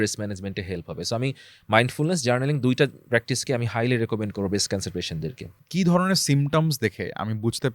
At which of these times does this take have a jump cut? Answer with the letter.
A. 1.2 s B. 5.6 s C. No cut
B